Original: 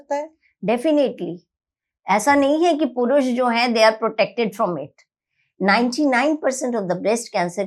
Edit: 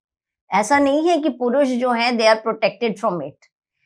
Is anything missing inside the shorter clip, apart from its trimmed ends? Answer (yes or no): no